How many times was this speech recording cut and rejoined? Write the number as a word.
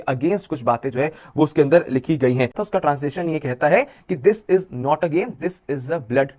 one